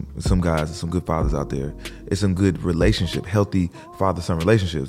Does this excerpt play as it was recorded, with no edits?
yes; 0 cuts

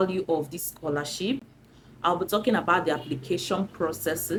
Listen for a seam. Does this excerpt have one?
no; 0 cuts

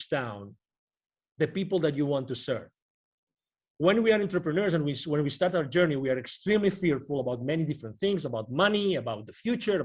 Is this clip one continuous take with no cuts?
yes; 0 cuts

